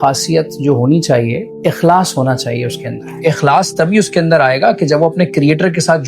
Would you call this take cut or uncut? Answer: cut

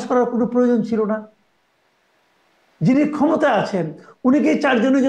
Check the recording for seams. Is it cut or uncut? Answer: uncut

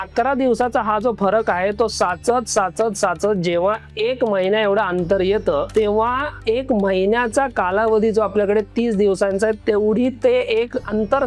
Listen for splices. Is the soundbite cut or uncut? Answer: cut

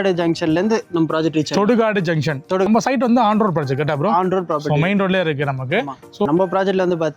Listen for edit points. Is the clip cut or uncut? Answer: cut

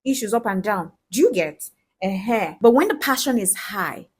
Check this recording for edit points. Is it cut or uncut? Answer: cut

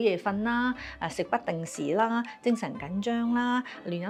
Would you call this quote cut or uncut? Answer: uncut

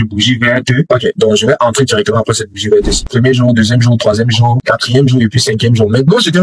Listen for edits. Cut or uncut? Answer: cut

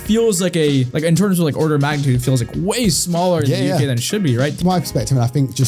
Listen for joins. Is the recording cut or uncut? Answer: cut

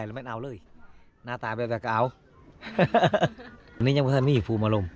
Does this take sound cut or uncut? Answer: cut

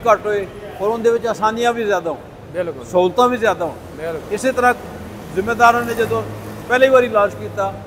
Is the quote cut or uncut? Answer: uncut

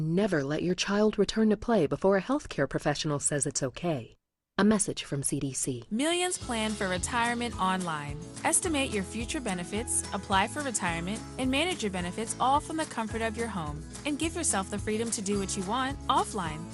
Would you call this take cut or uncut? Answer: cut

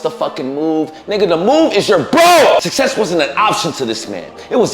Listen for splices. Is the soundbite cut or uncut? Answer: cut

